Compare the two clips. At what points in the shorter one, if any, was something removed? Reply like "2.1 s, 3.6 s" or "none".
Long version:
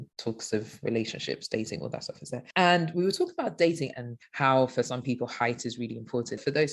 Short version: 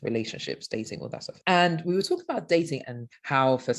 1.4 s